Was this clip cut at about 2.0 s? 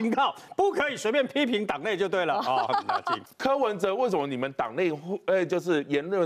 no; 1 cut; at 3.2 s

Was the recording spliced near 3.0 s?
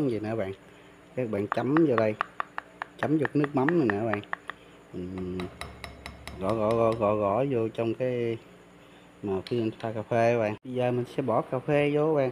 no; 1 cut; at 10.6 s

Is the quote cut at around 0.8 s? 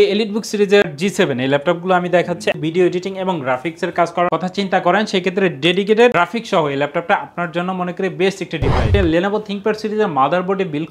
yes; 3 cuts; at 0.8 s, 2.6 s, 8.9 s

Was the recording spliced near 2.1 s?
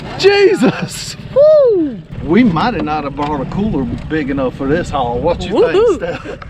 yes; 1 cut; at 2.1 s

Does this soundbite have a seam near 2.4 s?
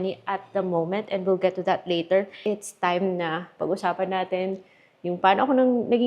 yes; 1 cut; at 2.4 s

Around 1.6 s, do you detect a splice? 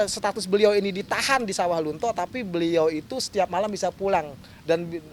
no; 0 cuts

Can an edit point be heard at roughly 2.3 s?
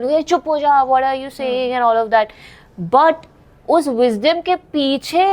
no; 0 cuts

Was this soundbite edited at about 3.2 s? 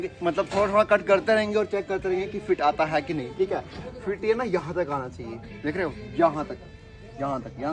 no; 0 cuts

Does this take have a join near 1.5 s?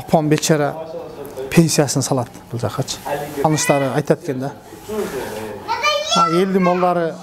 no; 1 cut; at 3.4 s

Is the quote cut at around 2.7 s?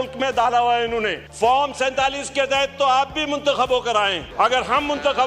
no; 2 cuts; at 1.2 s, 4.2 s

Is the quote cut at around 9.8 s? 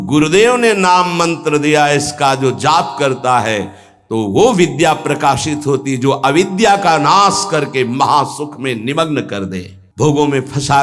yes; 1 cut; at 9.8 s

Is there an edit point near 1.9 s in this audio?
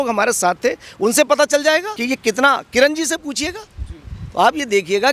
yes; 1 cut; at 1.9 s

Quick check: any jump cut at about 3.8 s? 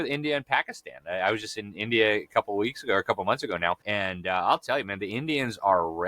yes; 1 cut; at 3.8 s

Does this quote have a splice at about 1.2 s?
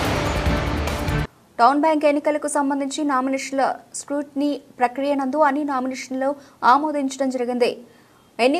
yes; 1 cut; at 1.2 s

